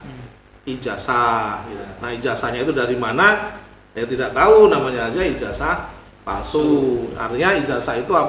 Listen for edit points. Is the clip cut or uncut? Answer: uncut